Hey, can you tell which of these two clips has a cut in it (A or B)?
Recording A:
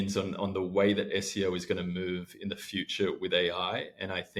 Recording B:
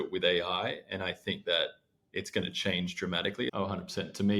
B